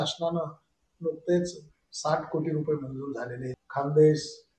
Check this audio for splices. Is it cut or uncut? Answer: cut